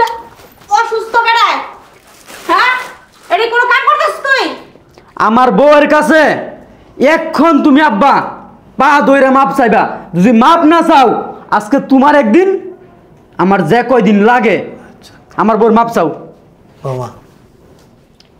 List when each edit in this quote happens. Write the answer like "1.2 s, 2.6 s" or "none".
none